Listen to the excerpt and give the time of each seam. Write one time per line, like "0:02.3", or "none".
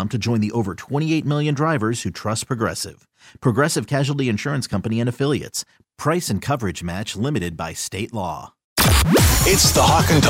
0:08.7